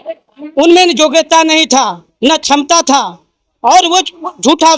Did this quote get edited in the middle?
no; 0 cuts

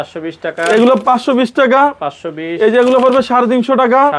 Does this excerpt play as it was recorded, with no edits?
yes; 0 cuts

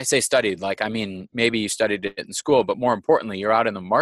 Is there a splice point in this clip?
no; 0 cuts

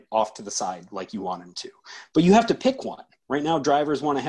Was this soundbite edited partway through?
no; 0 cuts

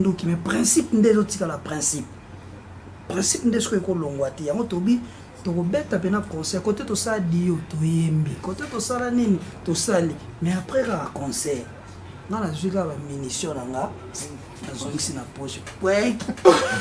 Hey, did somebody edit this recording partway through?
no; 0 cuts

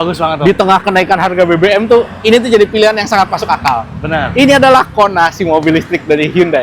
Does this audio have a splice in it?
no; 0 cuts

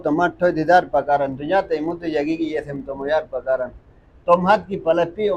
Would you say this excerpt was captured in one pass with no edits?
yes; 0 cuts

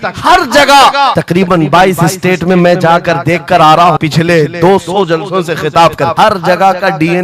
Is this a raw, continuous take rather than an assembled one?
no; 3 cuts; at 1.2 s, 4.0 s, 6.1 s

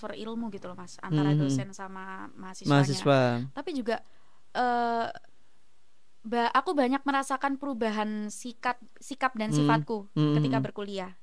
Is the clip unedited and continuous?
yes; 0 cuts

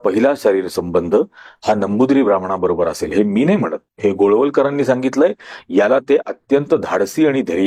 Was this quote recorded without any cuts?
yes; 0 cuts

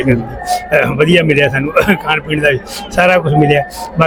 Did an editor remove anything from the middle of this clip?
no; 0 cuts

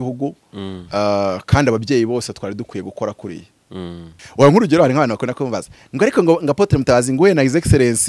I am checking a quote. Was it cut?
yes; 1 cut; at 4.1 s

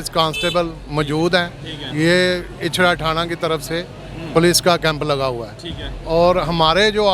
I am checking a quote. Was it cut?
no; 0 cuts

